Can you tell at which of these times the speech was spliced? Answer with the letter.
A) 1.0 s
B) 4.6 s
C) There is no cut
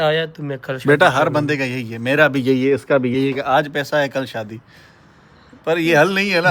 C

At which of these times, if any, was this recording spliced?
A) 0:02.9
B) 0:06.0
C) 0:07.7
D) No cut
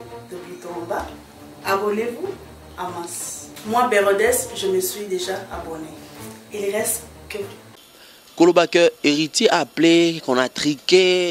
C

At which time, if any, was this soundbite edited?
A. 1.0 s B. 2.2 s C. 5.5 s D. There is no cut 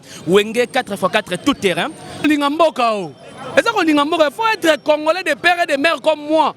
B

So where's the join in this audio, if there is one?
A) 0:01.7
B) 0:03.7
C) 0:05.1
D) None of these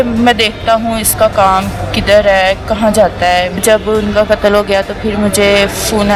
D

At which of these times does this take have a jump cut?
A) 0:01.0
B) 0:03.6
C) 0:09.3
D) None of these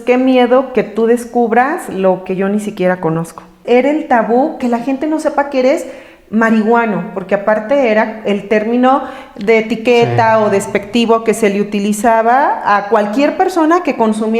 B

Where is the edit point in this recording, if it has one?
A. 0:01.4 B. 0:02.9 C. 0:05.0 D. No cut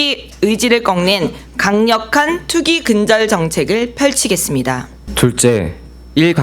C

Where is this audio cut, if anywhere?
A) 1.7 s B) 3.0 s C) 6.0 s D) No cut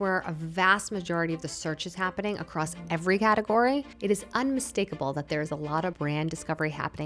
C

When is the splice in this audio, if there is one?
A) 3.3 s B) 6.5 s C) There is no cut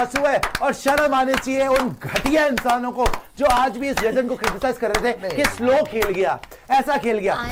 C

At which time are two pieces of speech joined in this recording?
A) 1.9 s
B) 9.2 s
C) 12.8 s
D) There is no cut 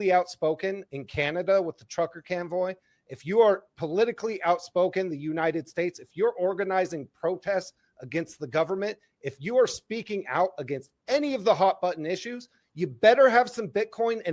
D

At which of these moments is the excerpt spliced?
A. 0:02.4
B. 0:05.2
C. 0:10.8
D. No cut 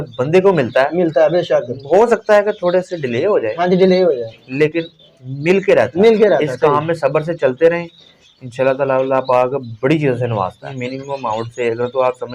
C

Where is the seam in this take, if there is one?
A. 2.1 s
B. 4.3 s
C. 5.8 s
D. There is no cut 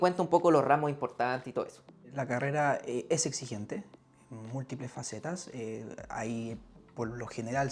A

